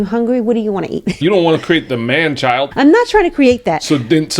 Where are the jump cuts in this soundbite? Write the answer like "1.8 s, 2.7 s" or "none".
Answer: 1.2 s, 2.7 s